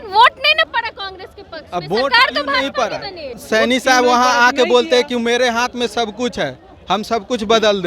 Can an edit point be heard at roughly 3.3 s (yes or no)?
yes